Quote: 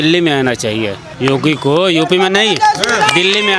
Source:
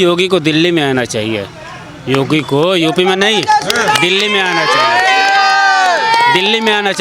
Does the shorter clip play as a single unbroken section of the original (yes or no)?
no